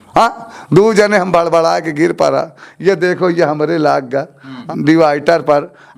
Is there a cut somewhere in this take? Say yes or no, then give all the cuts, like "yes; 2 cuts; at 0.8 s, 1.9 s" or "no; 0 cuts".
yes; 1 cut; at 4.5 s